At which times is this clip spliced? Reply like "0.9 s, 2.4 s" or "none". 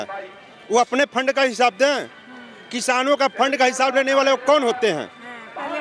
none